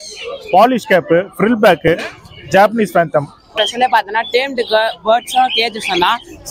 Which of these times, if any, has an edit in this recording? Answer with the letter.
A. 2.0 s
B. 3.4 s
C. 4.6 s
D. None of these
B